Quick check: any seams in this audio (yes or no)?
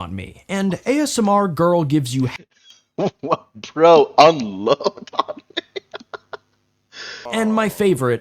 yes